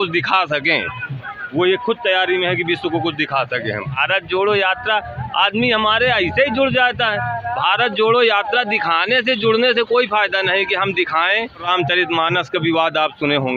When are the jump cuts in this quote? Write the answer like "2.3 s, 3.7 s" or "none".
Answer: 4.0 s, 11.7 s